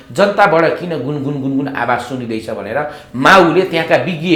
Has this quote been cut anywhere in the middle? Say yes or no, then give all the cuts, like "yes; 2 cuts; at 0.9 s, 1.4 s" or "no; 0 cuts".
no; 0 cuts